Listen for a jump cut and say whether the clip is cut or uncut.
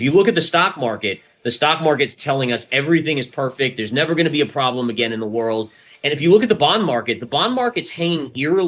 uncut